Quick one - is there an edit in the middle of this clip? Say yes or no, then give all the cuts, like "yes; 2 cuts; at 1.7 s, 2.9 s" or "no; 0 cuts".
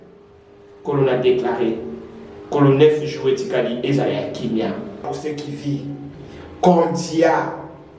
yes; 1 cut; at 5.0 s